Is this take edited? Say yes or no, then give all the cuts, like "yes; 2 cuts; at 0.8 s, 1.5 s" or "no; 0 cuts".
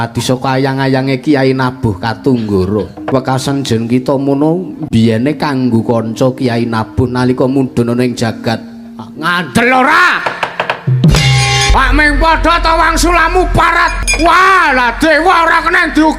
yes; 3 cuts; at 3.1 s, 11.7 s, 14.0 s